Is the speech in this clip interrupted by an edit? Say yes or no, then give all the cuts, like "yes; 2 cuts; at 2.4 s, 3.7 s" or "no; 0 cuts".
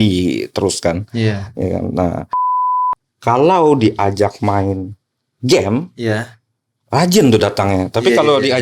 yes; 1 cut; at 2.6 s